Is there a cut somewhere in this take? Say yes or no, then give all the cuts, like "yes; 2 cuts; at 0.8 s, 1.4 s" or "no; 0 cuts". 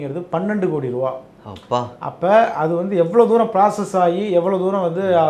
no; 0 cuts